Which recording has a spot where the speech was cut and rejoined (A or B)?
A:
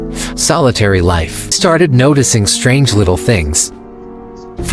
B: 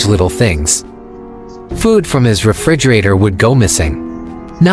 A